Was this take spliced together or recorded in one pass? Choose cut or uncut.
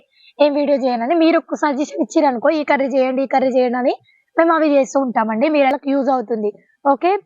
cut